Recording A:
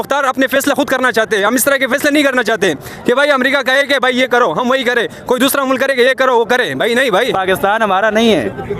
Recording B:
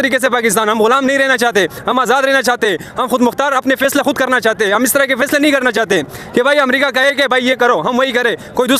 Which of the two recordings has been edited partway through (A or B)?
A